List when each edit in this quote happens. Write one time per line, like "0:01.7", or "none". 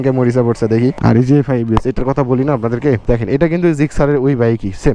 0:01.0